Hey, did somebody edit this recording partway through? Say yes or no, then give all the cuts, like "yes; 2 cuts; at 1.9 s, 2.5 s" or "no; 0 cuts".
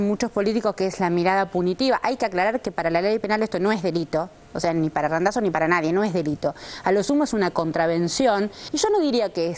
yes; 1 cut; at 8.6 s